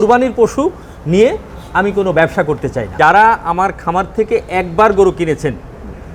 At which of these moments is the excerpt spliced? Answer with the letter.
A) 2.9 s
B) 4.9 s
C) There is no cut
A